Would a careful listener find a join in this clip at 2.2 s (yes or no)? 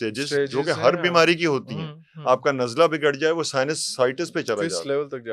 no